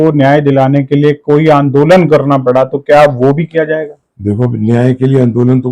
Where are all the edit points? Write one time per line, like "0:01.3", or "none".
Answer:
none